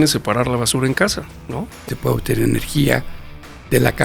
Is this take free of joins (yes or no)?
no